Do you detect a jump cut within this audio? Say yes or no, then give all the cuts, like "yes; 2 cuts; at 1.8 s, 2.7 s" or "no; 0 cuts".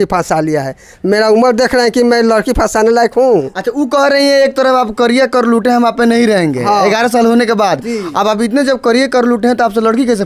no; 0 cuts